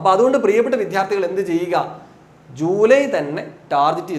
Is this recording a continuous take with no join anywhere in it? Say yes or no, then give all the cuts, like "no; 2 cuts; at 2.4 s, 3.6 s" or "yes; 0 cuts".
yes; 0 cuts